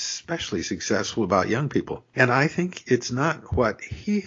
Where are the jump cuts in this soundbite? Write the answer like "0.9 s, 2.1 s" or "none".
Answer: 2.0 s